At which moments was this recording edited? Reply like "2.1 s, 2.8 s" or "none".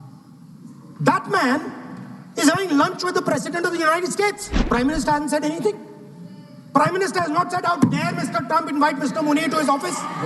4.5 s

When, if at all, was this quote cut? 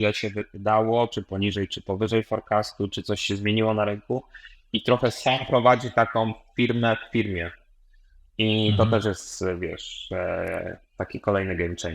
none

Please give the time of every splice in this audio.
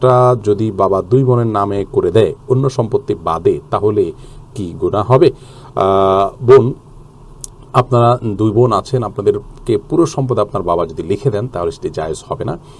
none

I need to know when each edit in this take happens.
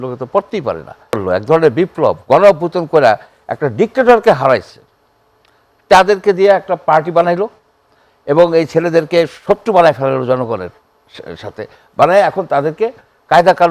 1.2 s

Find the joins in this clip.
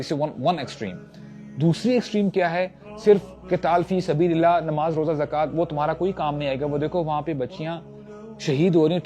none

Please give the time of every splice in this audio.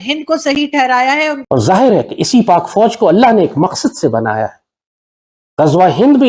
1.4 s

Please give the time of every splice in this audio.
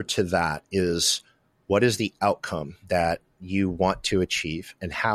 2.7 s

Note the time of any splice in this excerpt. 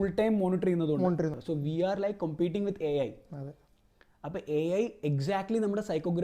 1.4 s

